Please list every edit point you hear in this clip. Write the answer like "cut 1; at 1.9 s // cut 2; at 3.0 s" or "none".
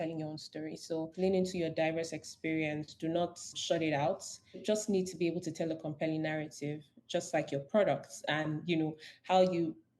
cut 1; at 1.1 s // cut 2; at 4.6 s